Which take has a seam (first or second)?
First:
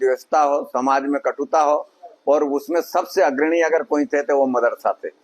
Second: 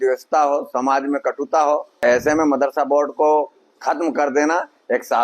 second